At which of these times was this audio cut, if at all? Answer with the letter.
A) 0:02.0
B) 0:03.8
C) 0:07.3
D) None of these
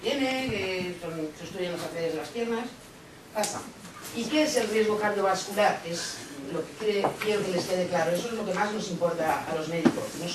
C